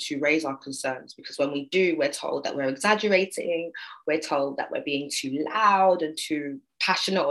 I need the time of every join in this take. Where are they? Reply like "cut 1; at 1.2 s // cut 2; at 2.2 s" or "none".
none